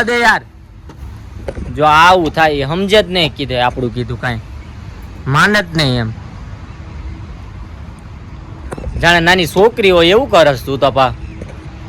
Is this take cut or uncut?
uncut